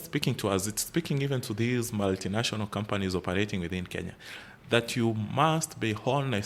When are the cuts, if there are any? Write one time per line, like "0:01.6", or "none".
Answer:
none